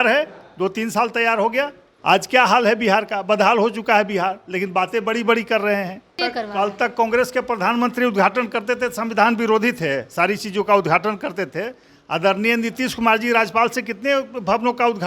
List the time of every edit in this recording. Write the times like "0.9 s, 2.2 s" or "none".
1.9 s, 6.1 s

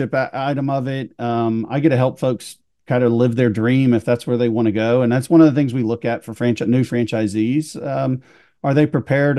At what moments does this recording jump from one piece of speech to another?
none

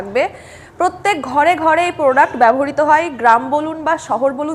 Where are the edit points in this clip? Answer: none

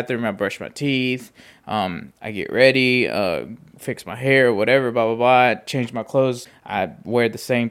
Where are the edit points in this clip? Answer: 6.5 s

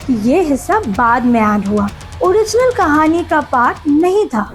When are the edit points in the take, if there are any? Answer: none

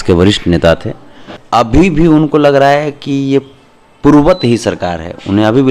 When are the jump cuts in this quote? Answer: 1.4 s

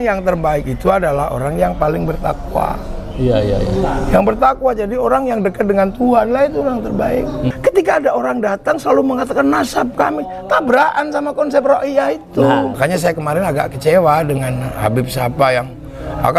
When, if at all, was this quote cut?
7.6 s, 12.8 s

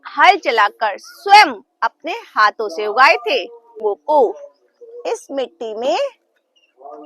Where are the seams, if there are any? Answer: 3.8 s

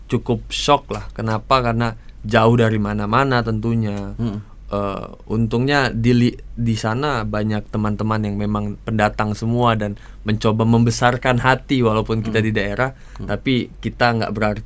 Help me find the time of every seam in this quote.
none

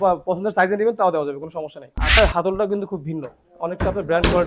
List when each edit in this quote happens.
2.2 s

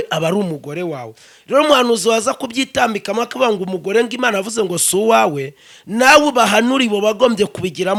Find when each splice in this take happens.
none

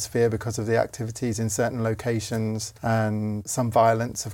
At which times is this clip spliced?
2.7 s, 3.4 s

